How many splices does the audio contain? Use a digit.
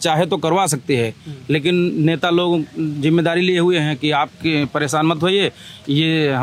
0